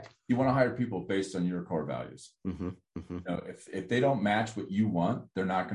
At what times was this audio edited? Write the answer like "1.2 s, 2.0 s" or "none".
none